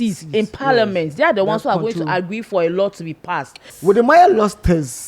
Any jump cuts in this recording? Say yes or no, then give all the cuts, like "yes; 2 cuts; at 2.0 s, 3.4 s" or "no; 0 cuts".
yes; 1 cut; at 3.7 s